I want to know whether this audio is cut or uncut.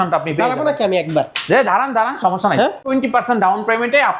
cut